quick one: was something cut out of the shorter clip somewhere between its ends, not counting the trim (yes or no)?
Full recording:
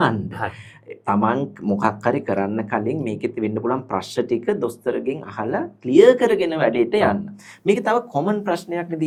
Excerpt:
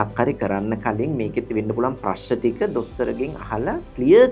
no